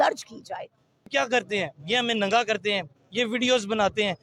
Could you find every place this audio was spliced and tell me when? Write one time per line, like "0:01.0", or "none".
0:01.0